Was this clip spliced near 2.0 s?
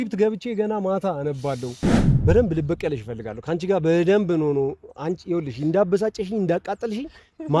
yes; 1 cut; at 2.0 s

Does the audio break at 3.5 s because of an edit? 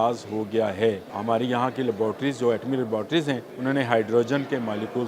yes; 2 cuts; at 1.1 s, 3.5 s

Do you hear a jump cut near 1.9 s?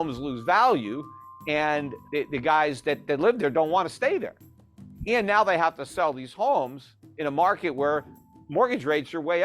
yes; 1 cut; at 1.9 s

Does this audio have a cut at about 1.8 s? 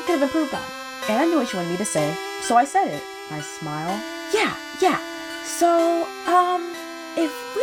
no; 0 cuts

